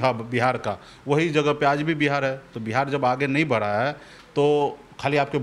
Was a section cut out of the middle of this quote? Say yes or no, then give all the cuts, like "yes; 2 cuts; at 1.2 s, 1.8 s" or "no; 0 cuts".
no; 0 cuts